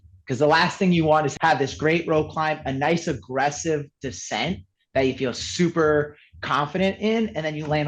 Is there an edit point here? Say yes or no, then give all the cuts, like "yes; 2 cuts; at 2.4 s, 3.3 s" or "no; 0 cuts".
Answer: yes; 1 cut; at 1.3 s